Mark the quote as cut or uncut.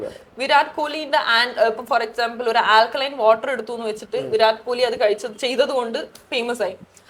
uncut